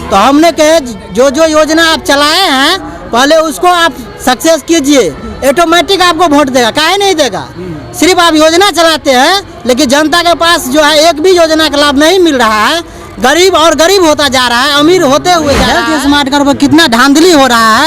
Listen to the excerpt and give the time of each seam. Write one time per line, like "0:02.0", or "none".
0:15.7